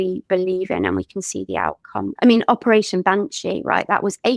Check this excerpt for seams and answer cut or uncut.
cut